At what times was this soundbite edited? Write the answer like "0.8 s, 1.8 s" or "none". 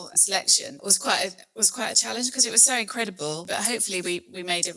0.8 s, 3.5 s